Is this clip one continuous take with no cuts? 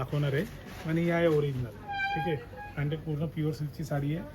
yes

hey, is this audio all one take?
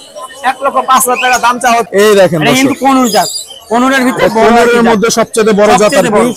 no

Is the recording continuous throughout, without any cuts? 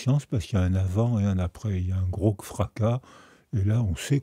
yes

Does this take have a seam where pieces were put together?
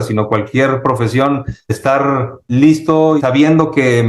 yes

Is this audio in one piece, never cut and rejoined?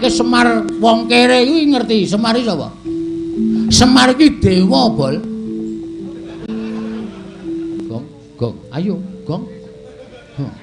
no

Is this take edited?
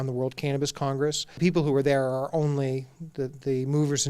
yes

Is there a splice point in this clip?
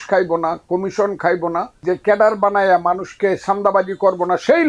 yes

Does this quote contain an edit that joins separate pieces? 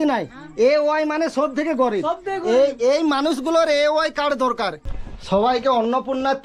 yes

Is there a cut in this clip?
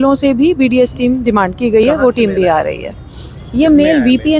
no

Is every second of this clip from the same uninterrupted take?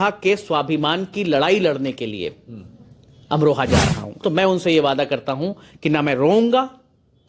no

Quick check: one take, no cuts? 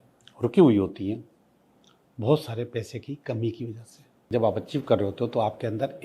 no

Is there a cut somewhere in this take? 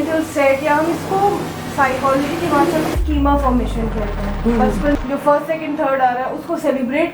yes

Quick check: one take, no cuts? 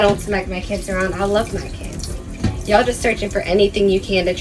yes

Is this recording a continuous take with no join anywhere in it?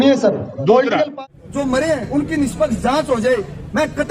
no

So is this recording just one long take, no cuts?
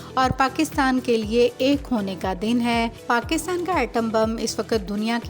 no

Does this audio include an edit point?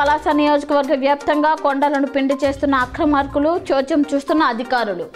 no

